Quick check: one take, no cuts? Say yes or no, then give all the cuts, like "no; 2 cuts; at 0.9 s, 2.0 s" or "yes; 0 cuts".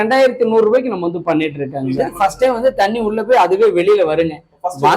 no; 1 cut; at 2.1 s